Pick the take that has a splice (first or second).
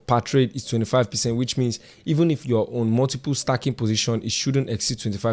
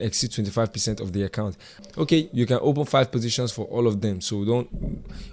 second